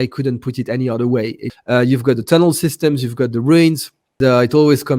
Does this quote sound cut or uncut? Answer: cut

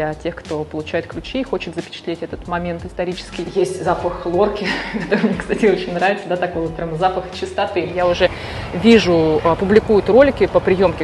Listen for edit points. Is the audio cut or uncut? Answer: cut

